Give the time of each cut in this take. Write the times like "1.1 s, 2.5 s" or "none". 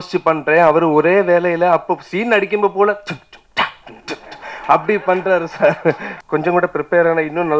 6.1 s